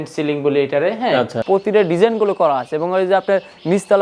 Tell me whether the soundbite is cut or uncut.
cut